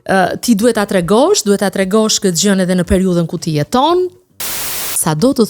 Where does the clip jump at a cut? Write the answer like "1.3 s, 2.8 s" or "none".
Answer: 4.5 s